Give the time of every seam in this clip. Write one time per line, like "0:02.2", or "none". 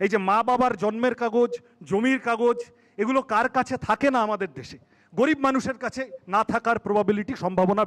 none